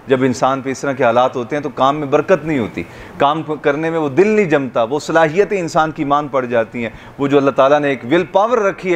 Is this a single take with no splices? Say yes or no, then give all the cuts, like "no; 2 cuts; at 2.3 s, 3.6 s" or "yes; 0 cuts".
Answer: yes; 0 cuts